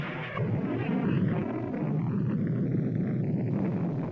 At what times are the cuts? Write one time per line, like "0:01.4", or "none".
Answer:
0:01.5